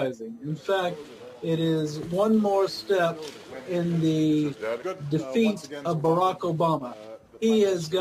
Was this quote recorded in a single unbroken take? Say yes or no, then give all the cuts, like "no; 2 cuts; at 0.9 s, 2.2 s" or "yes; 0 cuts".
yes; 0 cuts